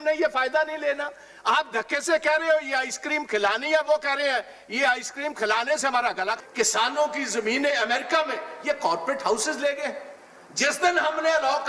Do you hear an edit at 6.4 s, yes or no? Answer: yes